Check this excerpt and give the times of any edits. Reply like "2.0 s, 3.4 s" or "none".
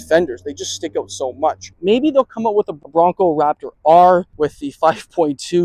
1.7 s, 4.3 s